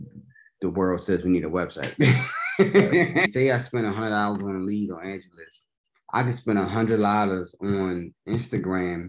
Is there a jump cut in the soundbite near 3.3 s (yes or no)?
yes